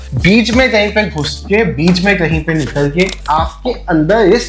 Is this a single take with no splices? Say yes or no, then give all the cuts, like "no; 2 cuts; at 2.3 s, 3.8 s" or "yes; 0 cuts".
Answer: no; 1 cut; at 3.2 s